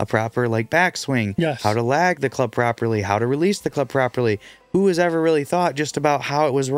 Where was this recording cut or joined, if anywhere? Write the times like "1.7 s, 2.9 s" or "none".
none